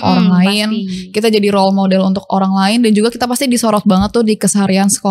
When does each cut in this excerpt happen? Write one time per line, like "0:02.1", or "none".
none